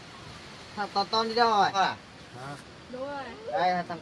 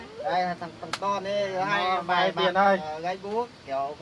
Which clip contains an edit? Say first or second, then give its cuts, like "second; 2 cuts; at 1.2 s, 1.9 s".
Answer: first; 1 cut; at 1.7 s